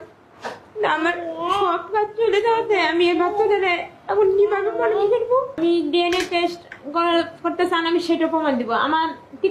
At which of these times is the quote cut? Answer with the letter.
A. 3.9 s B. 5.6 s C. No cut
B